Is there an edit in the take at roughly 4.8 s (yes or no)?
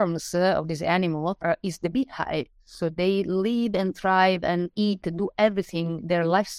no